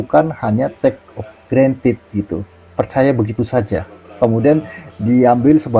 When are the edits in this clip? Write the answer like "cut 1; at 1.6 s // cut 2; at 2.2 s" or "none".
none